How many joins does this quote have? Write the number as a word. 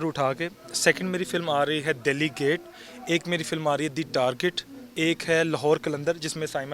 zero